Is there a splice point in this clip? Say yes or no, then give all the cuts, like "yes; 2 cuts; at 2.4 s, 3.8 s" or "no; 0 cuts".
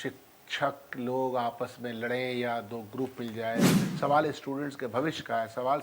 yes; 1 cut; at 3.9 s